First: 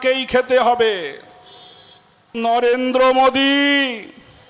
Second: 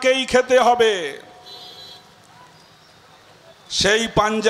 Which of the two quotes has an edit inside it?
first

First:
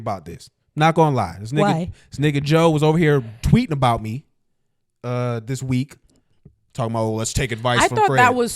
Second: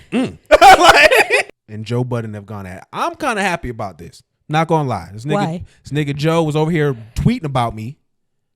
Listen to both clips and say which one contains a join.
second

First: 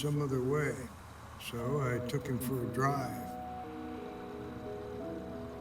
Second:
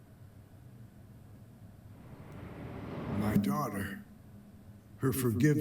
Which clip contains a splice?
second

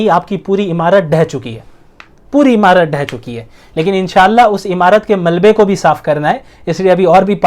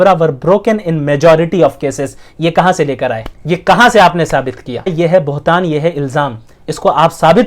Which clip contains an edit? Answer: second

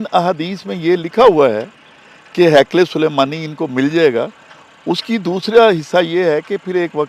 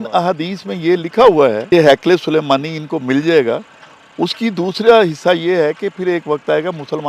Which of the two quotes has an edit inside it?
second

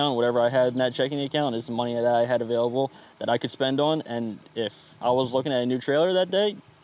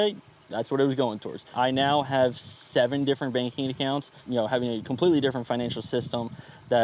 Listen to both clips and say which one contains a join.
second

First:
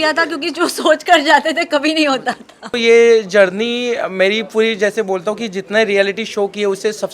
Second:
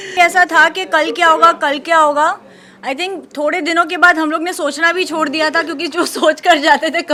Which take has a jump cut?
first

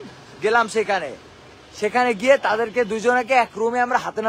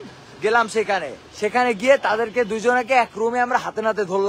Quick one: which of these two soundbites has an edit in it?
second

